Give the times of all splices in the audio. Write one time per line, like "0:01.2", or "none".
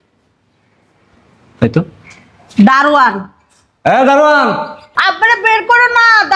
0:04.9